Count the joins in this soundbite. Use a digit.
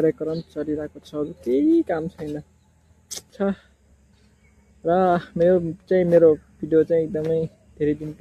1